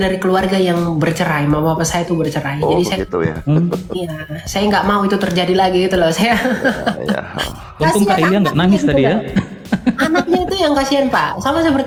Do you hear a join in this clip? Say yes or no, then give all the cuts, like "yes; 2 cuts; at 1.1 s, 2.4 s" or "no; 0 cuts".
no; 0 cuts